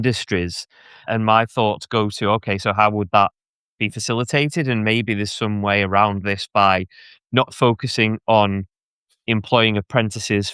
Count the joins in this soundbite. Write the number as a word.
one